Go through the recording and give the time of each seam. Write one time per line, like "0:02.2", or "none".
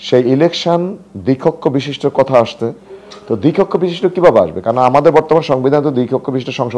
none